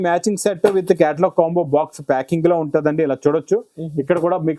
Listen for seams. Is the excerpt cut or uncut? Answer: uncut